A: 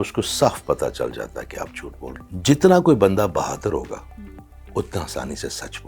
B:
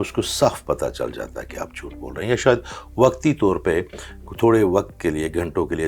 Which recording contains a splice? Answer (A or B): A